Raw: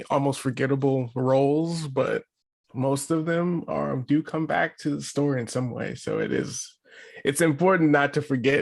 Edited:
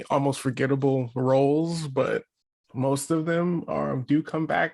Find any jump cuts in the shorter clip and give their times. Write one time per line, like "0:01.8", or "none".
none